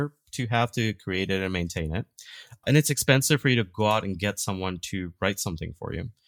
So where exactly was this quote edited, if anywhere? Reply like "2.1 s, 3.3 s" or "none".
2.6 s